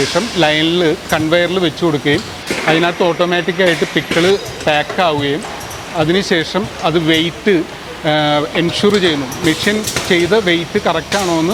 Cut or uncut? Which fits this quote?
uncut